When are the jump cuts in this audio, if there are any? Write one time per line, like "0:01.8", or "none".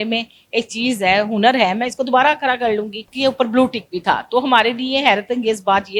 0:03.0